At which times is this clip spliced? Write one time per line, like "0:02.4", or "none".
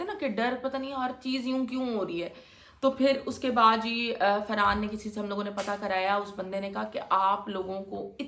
none